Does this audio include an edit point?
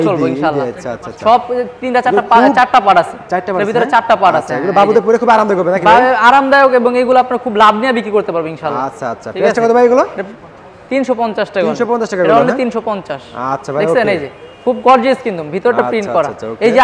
no; 0 cuts

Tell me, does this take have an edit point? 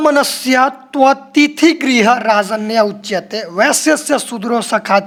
no; 0 cuts

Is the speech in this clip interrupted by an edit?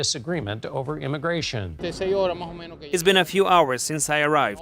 yes; 1 cut; at 1.8 s

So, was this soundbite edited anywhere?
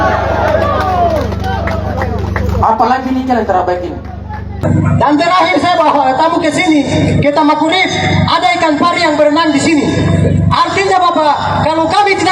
yes; 1 cut; at 4.6 s

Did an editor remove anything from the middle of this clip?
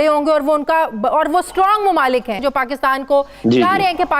yes; 1 cut; at 2.4 s

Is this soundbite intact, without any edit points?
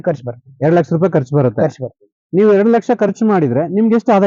yes; 0 cuts

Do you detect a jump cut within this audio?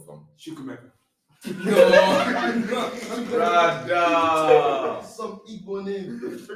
no; 0 cuts

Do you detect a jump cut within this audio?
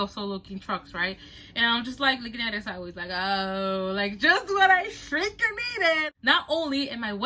no; 0 cuts

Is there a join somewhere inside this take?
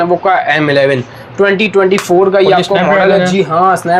no; 0 cuts

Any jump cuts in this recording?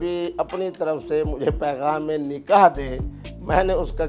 no; 0 cuts

